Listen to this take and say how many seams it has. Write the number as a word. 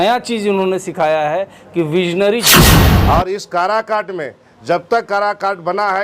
one